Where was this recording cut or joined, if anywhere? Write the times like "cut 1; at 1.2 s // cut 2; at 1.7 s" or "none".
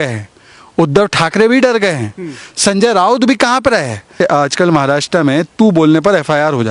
cut 1; at 4.1 s